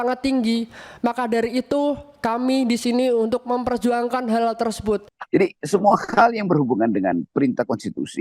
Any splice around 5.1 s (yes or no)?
yes